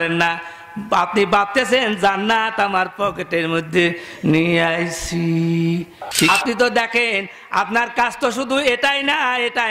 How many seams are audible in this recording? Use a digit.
1